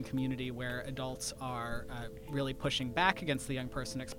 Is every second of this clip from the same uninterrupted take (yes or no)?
yes